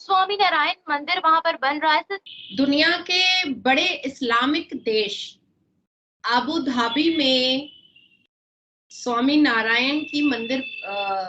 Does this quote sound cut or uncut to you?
cut